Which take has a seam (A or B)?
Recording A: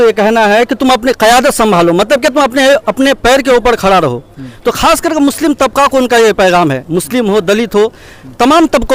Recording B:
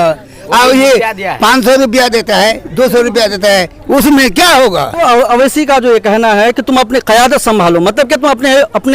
B